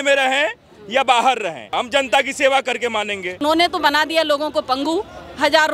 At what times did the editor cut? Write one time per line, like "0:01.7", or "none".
0:01.7
0:03.3